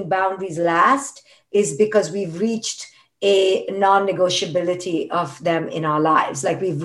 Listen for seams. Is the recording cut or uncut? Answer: uncut